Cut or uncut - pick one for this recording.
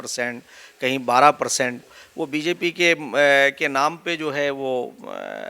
cut